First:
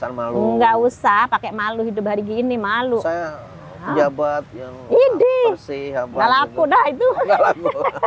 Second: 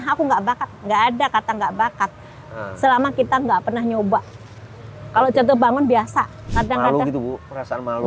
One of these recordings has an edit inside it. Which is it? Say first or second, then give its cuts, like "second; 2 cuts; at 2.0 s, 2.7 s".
second; 1 cut; at 6.4 s